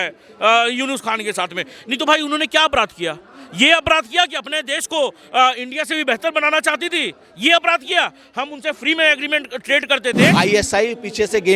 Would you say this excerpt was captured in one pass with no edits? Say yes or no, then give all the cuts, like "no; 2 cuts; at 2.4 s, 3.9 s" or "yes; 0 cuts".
no; 1 cut; at 10.3 s